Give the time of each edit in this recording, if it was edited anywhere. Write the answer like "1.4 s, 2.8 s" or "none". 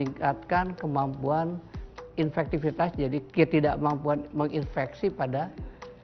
2.1 s, 3.3 s